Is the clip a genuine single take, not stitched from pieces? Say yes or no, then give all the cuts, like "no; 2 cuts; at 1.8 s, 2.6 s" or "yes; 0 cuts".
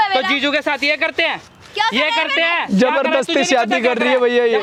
yes; 0 cuts